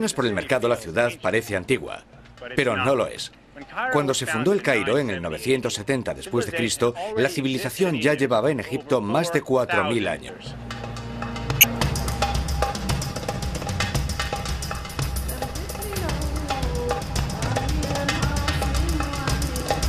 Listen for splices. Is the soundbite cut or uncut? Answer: cut